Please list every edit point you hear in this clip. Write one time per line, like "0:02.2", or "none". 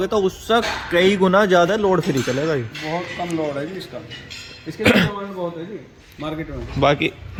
none

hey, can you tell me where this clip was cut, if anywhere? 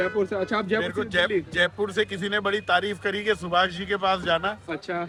none

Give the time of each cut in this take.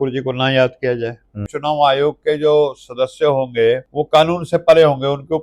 0:01.5
0:03.9

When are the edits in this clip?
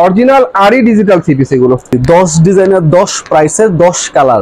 0:01.9

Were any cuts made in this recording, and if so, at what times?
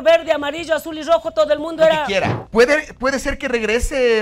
0:02.4

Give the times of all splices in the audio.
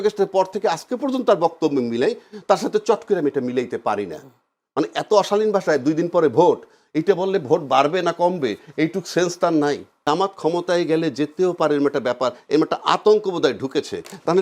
0:09.9

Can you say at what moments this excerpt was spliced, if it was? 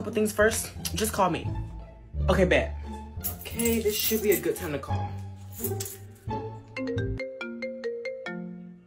none

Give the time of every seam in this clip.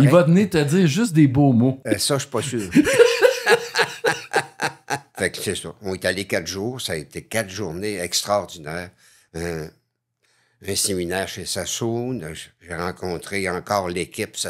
0:01.8
0:05.1

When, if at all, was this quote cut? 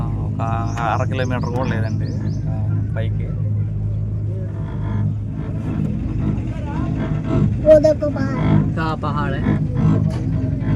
none

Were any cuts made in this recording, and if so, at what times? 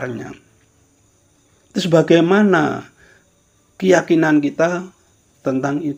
none

